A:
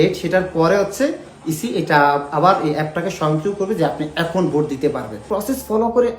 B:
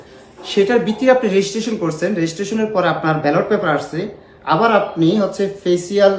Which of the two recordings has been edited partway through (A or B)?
A